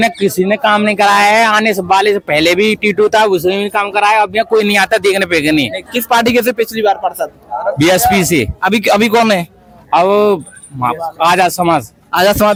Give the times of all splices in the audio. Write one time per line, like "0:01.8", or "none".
none

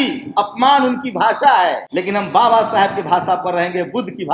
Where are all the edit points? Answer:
0:01.9

